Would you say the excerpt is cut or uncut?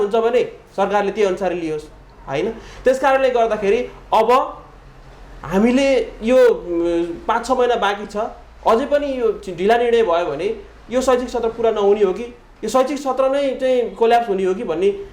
uncut